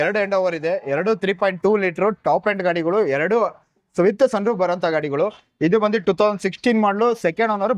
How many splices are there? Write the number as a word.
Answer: zero